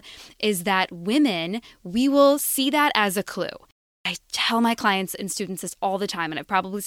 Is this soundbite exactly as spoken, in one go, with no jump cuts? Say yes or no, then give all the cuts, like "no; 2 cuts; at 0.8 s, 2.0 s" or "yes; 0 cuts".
no; 1 cut; at 3.9 s